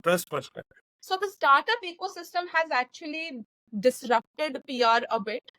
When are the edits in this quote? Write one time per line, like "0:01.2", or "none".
0:00.9